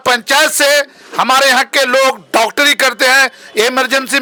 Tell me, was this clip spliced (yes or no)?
no